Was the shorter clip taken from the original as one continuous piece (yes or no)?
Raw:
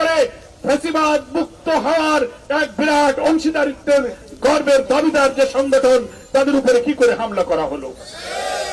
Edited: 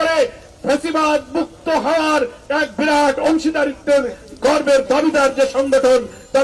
yes